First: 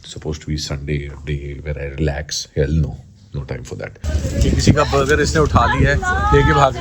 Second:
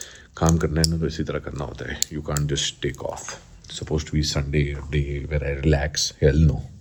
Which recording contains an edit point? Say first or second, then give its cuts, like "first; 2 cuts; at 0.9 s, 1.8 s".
first; 1 cut; at 4.2 s